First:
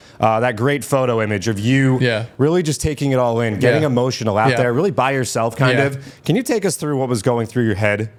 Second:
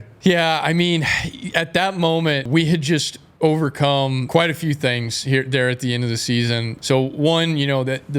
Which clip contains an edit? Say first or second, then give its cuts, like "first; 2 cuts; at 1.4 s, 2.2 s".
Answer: second; 3 cuts; at 2.5 s, 4.2 s, 6.7 s